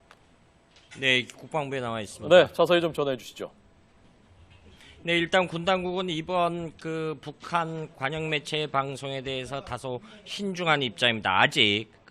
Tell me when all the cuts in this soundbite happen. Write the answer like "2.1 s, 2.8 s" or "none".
1.2 s